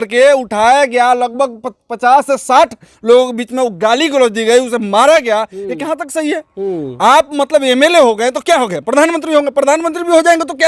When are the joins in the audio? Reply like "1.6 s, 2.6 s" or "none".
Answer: none